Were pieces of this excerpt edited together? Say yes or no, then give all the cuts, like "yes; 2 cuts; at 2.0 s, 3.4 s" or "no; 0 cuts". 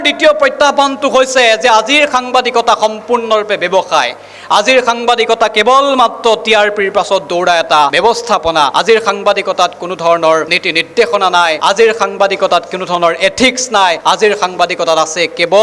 no; 0 cuts